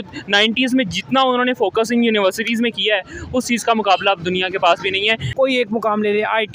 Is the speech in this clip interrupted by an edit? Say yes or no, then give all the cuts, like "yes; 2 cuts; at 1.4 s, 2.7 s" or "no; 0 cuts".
yes; 1 cut; at 5.3 s